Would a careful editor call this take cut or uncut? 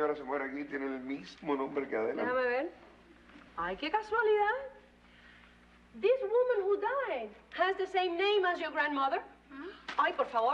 cut